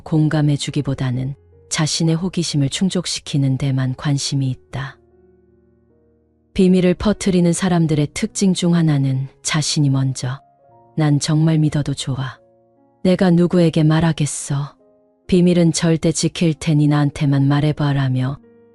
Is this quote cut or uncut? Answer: uncut